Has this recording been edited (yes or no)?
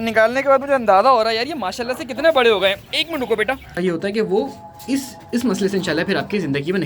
yes